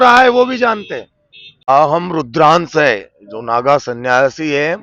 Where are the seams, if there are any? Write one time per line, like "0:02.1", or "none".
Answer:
0:01.7